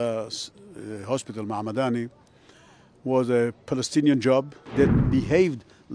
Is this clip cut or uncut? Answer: cut